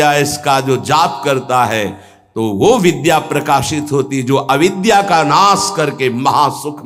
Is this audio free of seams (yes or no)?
yes